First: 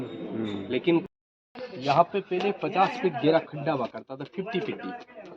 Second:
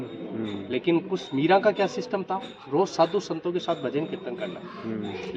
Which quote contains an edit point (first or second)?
first